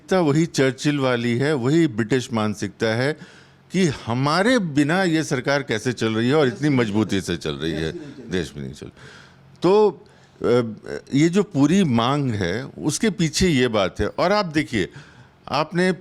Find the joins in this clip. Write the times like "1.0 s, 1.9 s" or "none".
none